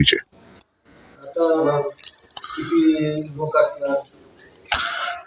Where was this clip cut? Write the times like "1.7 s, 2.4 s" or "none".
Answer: 1.7 s